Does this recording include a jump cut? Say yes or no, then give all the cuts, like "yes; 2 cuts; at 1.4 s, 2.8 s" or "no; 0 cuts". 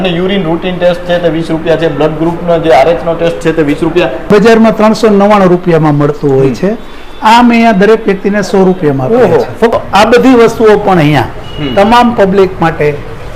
yes; 2 cuts; at 4.3 s, 9.7 s